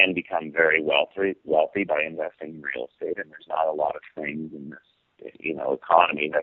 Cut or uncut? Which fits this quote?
uncut